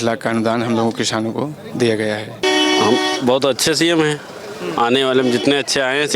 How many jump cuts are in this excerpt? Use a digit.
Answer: 1